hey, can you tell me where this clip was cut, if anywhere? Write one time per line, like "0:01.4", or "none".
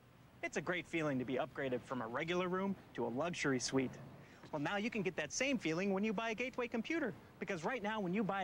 none

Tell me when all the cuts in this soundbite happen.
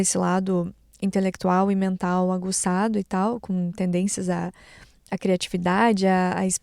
none

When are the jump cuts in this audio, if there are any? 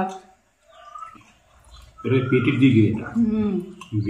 0:01.0

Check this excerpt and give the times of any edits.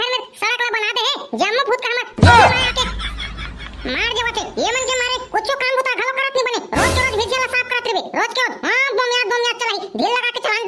none

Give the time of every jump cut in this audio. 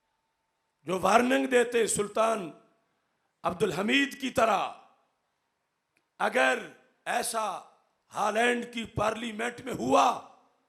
none

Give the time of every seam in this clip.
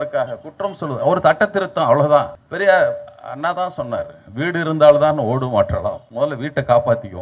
0:02.4
0:06.0

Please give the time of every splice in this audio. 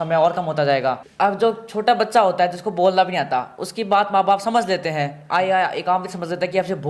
0:01.1

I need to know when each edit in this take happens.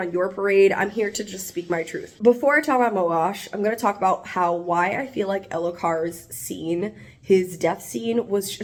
none

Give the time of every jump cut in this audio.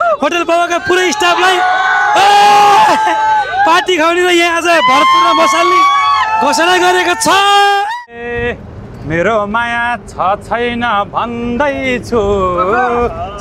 0:08.2

